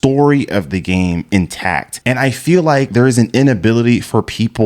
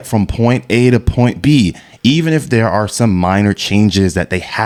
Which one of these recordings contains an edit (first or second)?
first